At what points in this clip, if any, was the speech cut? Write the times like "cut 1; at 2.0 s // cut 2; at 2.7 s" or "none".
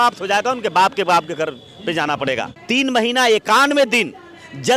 cut 1; at 2.5 s